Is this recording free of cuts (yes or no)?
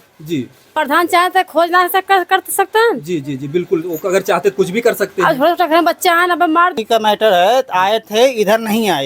no